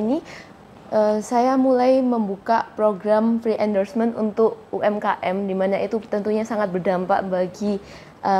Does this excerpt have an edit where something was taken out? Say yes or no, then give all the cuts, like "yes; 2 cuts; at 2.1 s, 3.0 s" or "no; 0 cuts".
no; 0 cuts